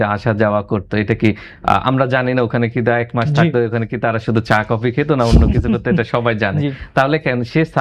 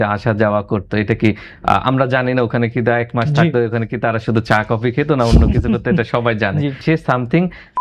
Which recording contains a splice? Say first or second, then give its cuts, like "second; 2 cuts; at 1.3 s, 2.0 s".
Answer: second; 1 cut; at 6.8 s